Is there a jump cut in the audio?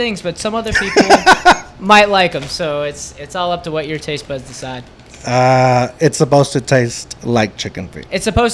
no; 0 cuts

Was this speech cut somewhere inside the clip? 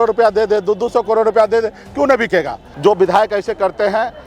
yes; 1 cut; at 2.6 s

